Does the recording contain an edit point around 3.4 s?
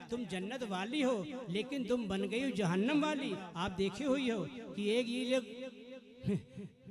yes; 1 cut; at 3.4 s

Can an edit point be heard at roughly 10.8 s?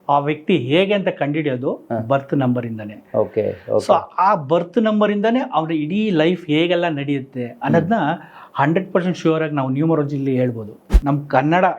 yes; 1 cut; at 10.8 s

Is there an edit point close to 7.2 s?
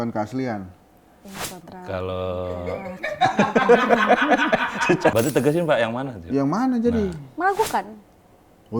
no; 1 cut; at 5.1 s

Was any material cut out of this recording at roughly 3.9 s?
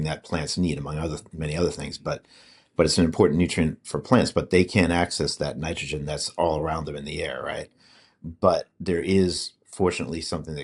no; 0 cuts

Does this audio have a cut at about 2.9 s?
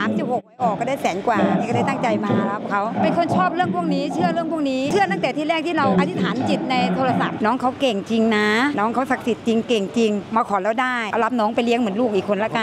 no; 0 cuts

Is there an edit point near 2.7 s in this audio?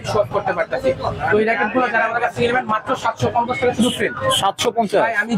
no; 0 cuts

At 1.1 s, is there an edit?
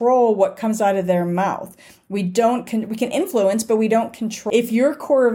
no; 1 cut; at 4.4 s

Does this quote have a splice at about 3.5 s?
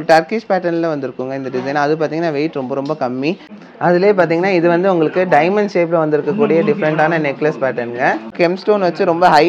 yes; 2 cuts; at 3.5 s, 8.3 s

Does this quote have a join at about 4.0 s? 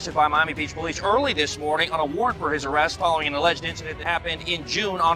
yes; 1 cut; at 4.0 s

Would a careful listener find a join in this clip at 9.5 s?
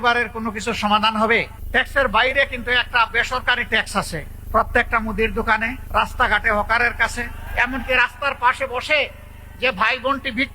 no; 4 cuts; at 1.6 s, 4.3 s, 5.8 s, 7.4 s

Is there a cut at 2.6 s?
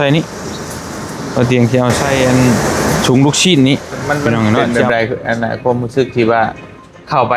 yes; 2 cuts; at 2.6 s, 4.6 s

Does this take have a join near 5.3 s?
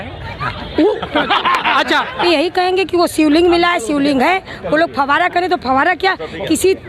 no; 1 cut; at 2.2 s

